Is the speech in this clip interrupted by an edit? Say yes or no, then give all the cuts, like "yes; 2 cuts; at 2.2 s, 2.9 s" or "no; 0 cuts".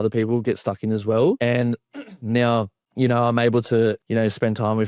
yes; 3 cuts; at 1.4 s, 2.8 s, 4.0 s